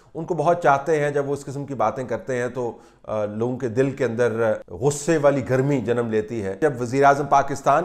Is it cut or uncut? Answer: cut